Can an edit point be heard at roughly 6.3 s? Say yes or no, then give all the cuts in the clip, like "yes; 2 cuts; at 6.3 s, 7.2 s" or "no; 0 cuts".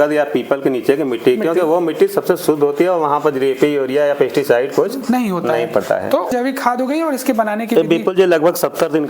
yes; 1 cut; at 6.3 s